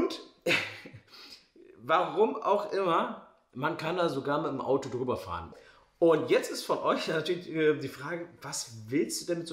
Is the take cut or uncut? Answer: cut